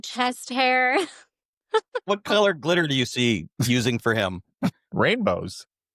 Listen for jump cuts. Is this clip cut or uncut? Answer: cut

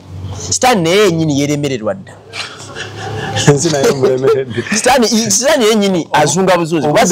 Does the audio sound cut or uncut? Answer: uncut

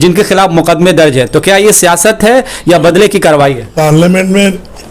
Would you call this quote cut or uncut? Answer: cut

